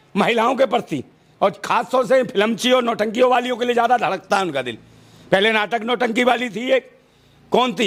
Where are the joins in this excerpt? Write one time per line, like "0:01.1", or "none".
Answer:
none